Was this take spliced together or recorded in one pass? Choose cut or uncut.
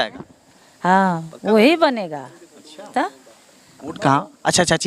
cut